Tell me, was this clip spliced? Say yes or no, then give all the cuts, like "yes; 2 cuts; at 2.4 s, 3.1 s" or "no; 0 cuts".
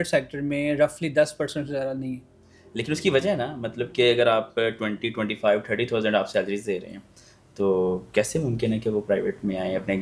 no; 0 cuts